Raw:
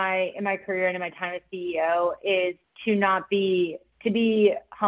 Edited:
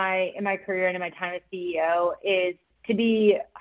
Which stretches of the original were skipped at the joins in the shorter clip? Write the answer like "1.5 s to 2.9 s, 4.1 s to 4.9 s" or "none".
2.7 s to 3.8 s